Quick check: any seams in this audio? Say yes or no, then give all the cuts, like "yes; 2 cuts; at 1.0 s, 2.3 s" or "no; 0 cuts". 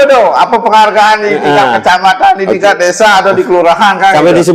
no; 0 cuts